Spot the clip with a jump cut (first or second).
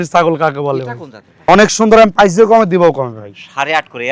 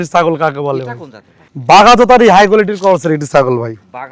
first